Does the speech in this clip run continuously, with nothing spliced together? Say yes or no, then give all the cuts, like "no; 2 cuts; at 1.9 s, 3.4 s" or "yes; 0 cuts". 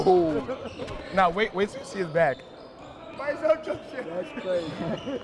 yes; 0 cuts